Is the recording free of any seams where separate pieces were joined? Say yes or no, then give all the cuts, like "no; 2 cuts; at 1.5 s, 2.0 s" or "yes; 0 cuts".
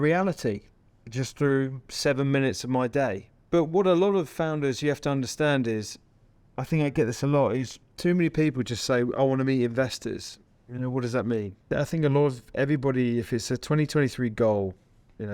yes; 0 cuts